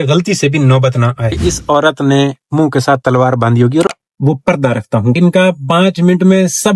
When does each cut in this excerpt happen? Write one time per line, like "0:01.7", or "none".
0:01.3
0:03.9